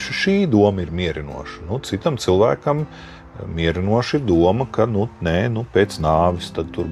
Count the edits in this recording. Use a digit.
0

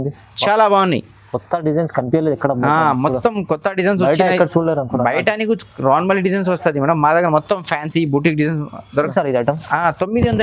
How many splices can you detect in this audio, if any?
1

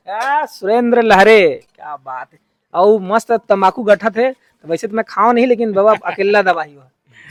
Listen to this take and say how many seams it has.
0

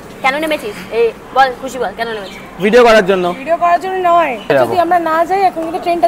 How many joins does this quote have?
1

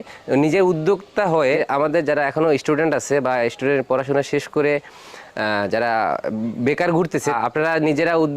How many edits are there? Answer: 2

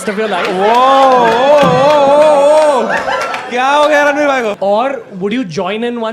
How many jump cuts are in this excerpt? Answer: 1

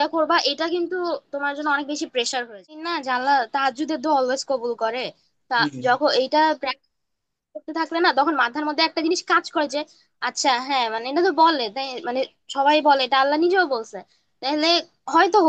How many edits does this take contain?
1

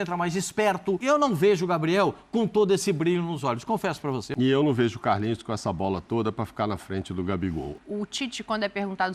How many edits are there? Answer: 3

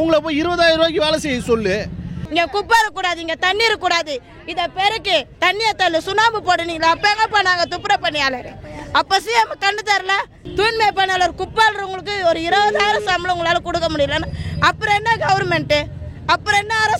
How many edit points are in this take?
2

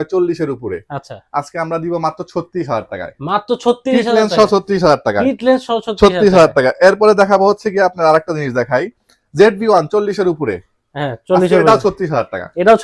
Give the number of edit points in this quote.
0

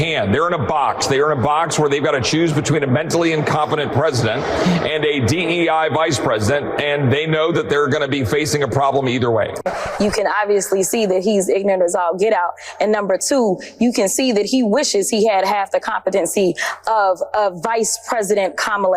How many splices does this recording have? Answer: 1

